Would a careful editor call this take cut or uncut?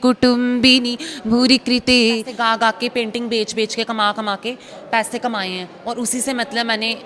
cut